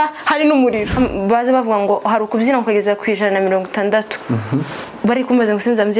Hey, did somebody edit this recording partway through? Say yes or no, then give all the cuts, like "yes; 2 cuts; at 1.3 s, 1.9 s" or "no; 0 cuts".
yes; 1 cut; at 1.0 s